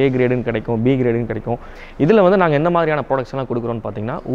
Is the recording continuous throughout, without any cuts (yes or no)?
no